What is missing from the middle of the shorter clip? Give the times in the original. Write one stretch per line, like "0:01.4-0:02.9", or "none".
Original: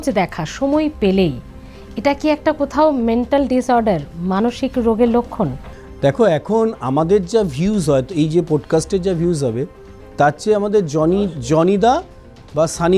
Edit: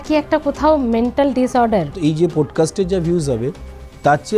0:04.1-0:08.1